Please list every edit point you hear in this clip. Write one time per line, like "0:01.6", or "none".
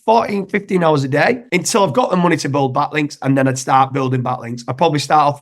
0:01.4